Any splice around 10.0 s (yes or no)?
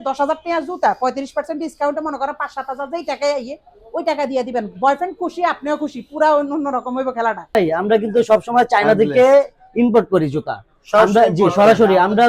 no